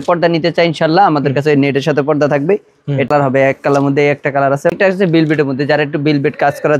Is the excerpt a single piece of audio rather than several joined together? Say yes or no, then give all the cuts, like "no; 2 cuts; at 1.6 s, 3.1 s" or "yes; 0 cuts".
no; 2 cuts; at 3.1 s, 4.7 s